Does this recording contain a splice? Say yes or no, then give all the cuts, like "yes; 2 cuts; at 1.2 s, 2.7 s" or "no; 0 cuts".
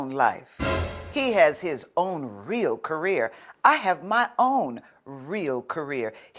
no; 0 cuts